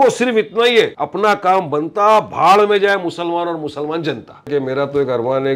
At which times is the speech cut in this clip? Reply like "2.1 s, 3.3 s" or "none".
1.0 s, 4.5 s